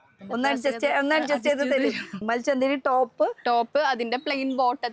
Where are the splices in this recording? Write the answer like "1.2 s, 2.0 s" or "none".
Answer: 2.2 s